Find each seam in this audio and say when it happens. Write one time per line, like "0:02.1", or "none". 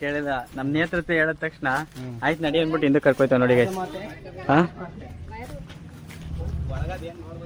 none

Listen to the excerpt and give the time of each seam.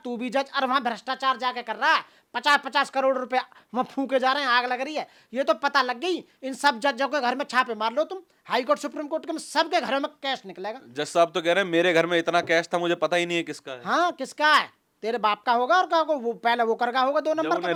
none

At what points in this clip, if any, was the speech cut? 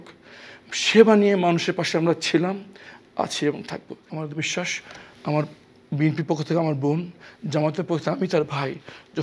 0:04.0

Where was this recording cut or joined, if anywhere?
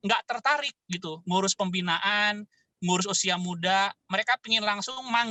none

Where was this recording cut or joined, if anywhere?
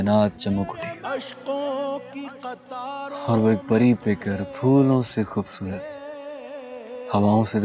0:01.0

